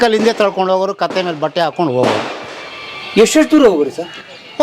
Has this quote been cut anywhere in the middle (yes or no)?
no